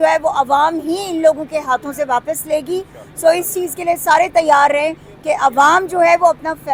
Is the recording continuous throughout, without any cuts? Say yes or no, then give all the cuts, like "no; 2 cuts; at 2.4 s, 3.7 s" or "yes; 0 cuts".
yes; 0 cuts